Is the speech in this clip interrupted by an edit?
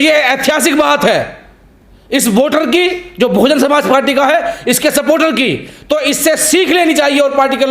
no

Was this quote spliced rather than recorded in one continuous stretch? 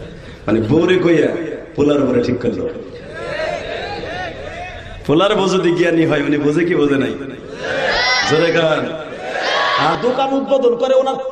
yes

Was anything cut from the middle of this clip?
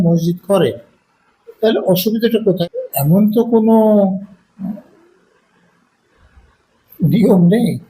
yes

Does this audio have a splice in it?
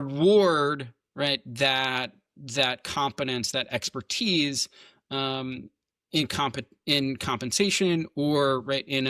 no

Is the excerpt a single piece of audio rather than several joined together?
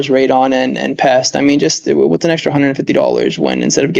yes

